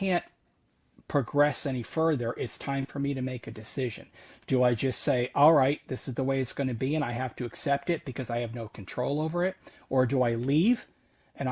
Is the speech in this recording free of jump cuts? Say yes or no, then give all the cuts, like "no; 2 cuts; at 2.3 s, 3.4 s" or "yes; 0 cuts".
yes; 0 cuts